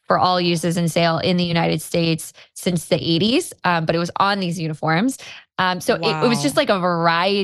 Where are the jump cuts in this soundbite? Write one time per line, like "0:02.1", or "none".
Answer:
none